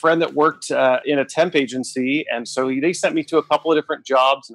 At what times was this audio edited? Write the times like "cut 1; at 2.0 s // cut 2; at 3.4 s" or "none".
cut 1; at 1.0 s